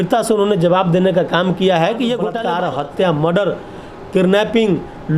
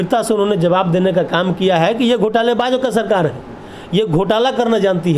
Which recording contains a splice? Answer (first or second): first